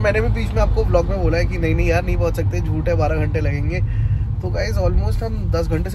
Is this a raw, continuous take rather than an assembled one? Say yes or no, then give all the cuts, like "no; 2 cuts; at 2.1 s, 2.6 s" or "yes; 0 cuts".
yes; 0 cuts